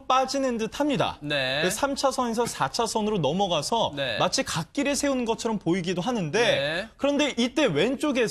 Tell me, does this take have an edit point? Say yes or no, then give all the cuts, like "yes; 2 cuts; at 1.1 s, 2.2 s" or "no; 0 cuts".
yes; 1 cut; at 3.6 s